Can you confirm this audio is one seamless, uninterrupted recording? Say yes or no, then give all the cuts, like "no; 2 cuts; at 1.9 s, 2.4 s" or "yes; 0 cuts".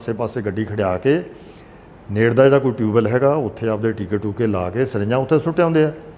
yes; 0 cuts